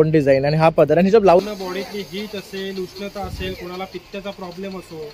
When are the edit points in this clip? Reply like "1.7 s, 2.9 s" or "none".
1.4 s